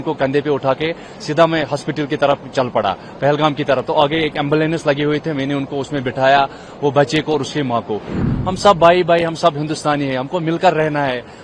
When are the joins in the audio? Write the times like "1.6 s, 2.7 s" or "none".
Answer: 8.1 s